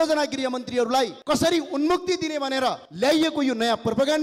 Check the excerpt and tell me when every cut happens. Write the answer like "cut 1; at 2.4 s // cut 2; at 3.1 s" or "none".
cut 1; at 1.2 s // cut 2; at 2.9 s

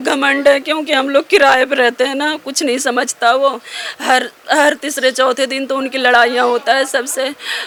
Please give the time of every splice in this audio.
none

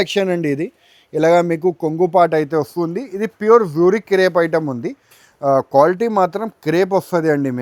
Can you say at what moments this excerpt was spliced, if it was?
none

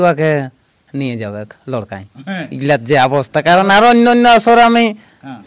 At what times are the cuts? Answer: none

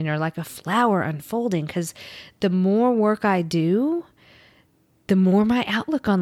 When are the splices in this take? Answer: none

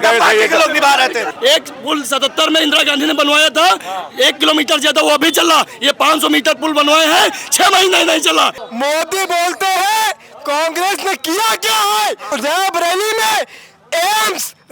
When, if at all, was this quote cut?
cut 1; at 1.3 s // cut 2; at 8.6 s // cut 3; at 12.2 s

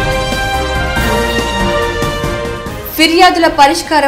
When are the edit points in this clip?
cut 1; at 2.7 s

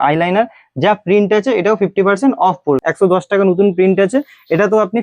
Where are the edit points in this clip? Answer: cut 1; at 2.8 s

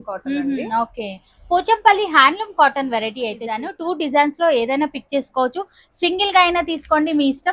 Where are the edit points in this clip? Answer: cut 1; at 3.7 s

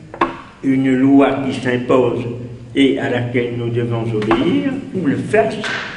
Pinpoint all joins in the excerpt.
none

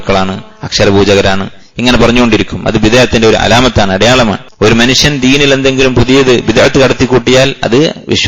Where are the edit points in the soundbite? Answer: cut 1; at 4.4 s

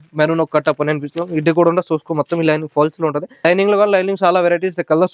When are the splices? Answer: cut 1; at 3.3 s

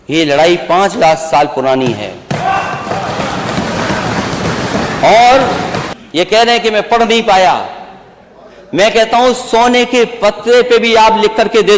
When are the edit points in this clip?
none

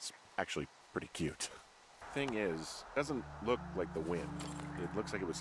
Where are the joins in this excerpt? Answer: cut 1; at 2.0 s

